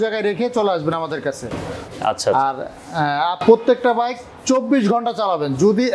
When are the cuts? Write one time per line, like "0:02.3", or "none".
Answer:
none